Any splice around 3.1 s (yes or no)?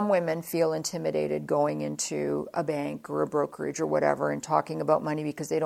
no